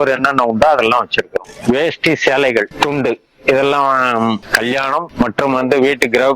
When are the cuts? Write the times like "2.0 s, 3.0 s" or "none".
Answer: 1.4 s